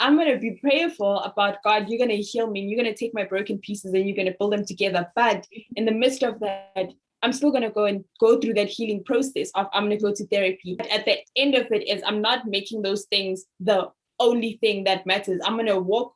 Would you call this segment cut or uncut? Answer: cut